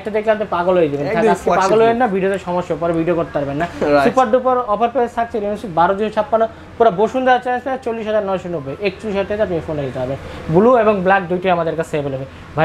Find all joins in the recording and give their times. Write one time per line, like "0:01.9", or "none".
none